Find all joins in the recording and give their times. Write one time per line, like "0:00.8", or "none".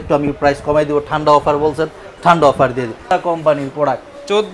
0:03.1